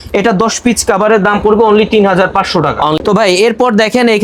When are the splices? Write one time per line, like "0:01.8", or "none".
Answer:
0:03.0